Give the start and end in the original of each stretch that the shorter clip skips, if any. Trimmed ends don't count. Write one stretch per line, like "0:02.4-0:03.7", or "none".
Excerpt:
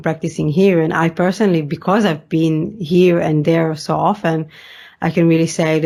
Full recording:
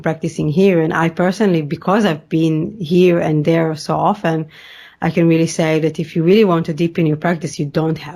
none